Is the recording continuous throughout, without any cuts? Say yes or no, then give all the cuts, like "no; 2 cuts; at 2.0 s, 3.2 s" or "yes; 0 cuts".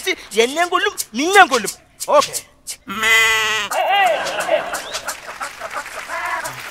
no; 1 cut; at 1.8 s